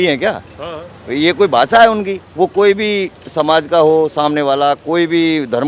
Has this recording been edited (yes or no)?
no